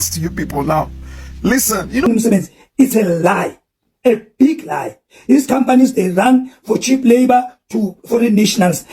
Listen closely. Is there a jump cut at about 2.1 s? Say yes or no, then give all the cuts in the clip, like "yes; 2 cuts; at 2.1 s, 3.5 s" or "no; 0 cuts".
yes; 1 cut; at 2.1 s